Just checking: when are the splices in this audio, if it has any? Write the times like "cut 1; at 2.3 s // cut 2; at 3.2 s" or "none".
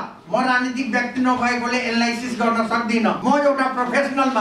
cut 1; at 3.2 s

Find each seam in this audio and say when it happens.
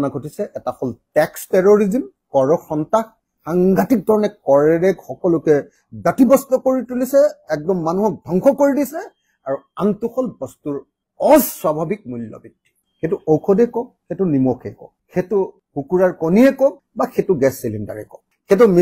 none

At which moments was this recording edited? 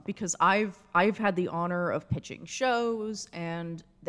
none

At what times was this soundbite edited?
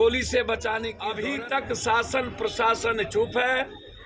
cut 1; at 1.1 s

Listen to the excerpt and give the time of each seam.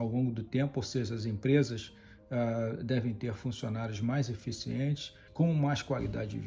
cut 1; at 5.2 s

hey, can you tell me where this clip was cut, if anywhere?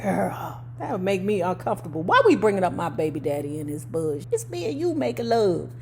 cut 1; at 4.2 s

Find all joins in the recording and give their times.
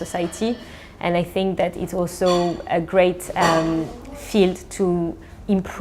none

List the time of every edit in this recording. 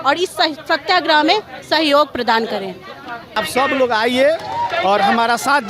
cut 1; at 3.3 s

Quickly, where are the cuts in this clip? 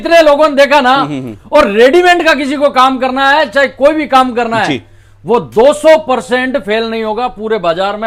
none

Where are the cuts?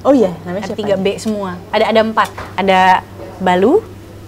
cut 1; at 1.6 s // cut 2; at 2.4 s

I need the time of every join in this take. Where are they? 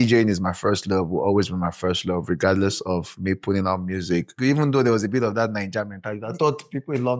cut 1; at 4.3 s

